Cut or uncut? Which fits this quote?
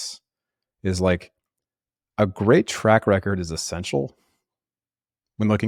uncut